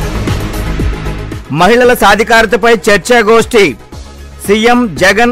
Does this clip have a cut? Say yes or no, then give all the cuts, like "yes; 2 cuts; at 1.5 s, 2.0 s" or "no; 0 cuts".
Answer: yes; 1 cut; at 0.9 s